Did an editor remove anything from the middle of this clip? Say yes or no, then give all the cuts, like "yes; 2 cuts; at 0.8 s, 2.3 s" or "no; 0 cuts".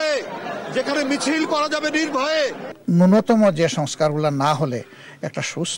yes; 1 cut; at 2.7 s